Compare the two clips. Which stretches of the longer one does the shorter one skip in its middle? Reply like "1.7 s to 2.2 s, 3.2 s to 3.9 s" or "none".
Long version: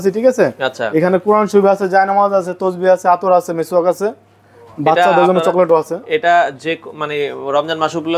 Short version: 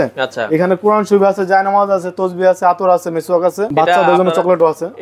4.1 s to 4.7 s